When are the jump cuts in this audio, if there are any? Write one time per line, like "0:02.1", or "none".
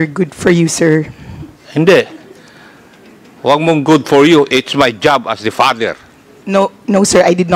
none